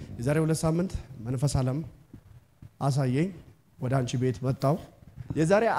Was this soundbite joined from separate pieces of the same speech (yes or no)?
no